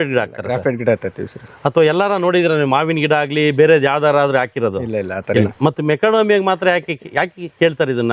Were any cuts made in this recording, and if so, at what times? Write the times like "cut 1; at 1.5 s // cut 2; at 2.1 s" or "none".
none